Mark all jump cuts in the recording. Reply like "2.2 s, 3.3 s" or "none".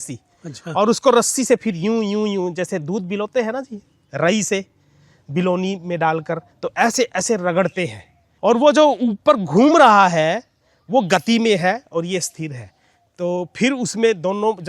8.2 s